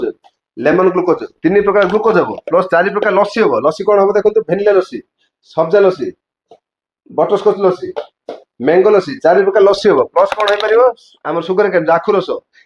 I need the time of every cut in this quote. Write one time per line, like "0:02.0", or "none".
none

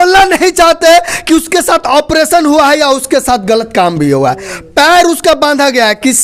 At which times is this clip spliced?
none

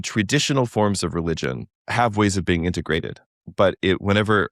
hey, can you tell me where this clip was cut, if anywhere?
0:01.8

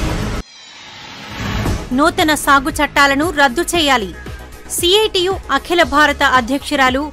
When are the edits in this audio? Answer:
0:01.5

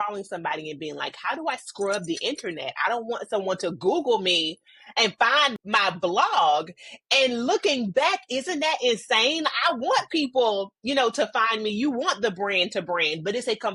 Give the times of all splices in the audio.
none

